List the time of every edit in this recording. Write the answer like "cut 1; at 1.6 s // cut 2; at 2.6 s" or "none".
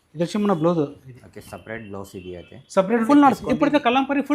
cut 1; at 3.0 s